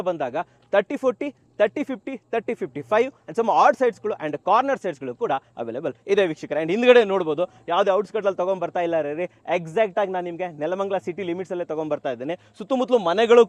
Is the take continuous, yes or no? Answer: yes